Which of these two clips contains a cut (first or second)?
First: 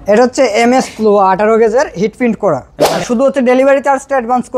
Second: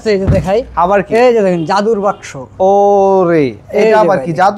first